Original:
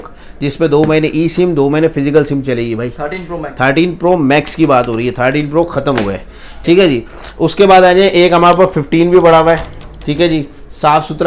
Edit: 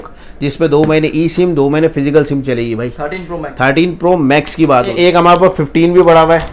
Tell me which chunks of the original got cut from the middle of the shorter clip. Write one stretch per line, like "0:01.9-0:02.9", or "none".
0:04.9-0:08.1